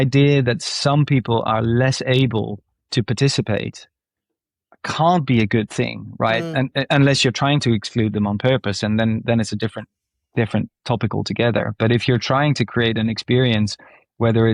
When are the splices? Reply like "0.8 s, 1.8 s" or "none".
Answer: none